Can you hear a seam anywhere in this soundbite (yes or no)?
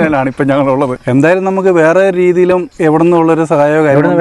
yes